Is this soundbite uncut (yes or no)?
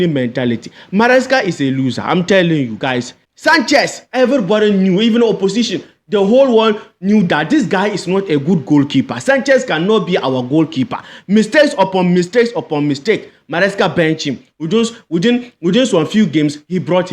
no